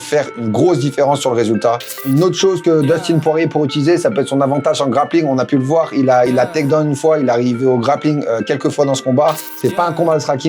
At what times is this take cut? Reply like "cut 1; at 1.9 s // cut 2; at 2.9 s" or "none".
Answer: cut 1; at 2.0 s // cut 2; at 9.5 s